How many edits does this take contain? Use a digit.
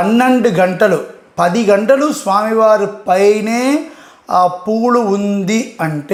0